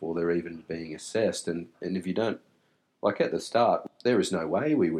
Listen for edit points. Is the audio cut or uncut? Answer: cut